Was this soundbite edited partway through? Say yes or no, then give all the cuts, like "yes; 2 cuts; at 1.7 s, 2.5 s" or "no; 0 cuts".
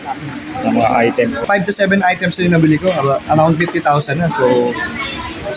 yes; 1 cut; at 1.3 s